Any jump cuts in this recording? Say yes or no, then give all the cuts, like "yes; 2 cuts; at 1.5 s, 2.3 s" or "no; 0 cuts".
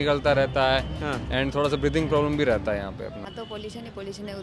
yes; 1 cut; at 3.2 s